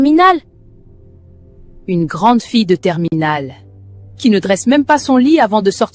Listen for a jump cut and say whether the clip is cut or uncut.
uncut